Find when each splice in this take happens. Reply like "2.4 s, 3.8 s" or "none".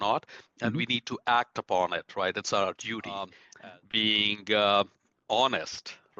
3.4 s